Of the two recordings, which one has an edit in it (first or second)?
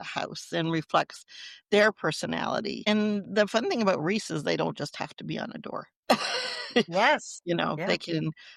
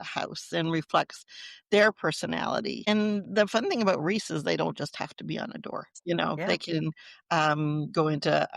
second